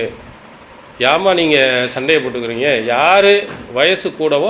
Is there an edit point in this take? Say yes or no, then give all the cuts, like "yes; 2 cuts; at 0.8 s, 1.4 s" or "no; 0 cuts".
no; 0 cuts